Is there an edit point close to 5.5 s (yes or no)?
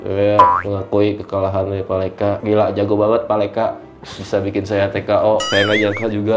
yes